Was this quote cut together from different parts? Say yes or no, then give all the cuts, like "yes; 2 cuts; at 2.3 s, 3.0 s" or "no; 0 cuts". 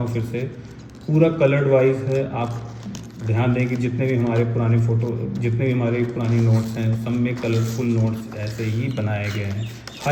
no; 0 cuts